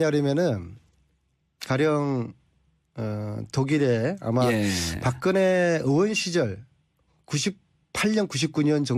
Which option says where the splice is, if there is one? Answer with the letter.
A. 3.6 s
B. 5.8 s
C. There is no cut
A